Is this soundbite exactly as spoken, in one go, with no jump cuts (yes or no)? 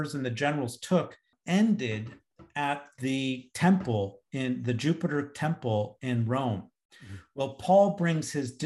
no